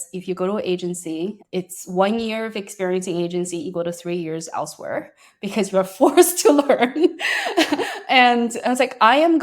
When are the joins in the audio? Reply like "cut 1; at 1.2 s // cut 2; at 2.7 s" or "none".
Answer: cut 1; at 1.4 s